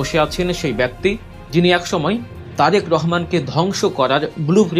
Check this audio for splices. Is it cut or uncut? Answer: cut